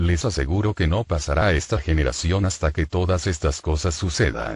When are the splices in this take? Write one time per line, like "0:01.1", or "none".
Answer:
0:02.2